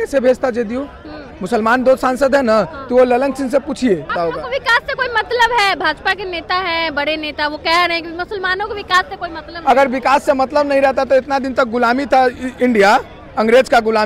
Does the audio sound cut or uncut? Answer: cut